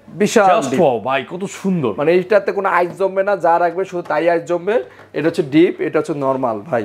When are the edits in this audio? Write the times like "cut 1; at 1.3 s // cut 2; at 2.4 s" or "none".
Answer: none

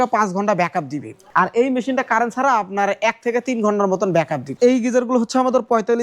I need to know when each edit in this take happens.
cut 1; at 1.2 s // cut 2; at 4.5 s

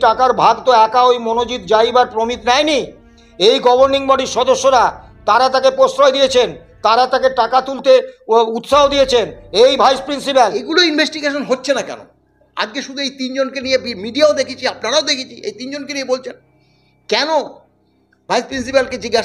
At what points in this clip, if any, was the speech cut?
cut 1; at 10.6 s

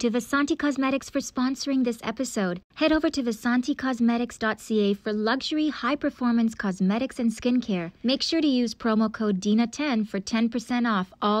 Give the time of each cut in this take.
cut 1; at 2.6 s // cut 2; at 7.9 s

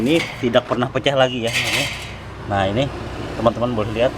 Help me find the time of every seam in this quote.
none

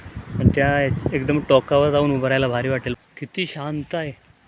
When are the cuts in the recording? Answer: cut 1; at 2.9 s

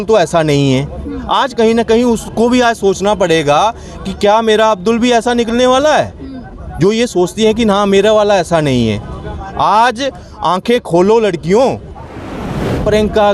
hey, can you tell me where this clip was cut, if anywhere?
cut 1; at 12.4 s

